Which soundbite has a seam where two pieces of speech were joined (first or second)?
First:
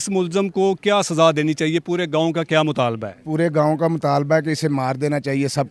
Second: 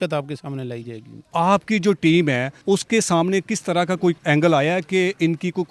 second